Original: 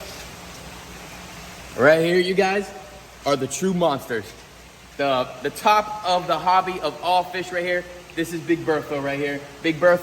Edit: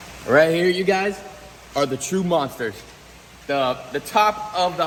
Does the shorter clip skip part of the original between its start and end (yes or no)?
no